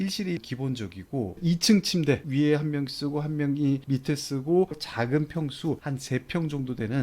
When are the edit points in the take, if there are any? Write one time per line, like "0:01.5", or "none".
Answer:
0:01.3
0:02.2